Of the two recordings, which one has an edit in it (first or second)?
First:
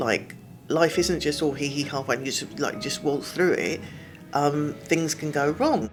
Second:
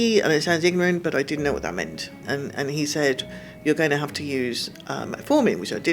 second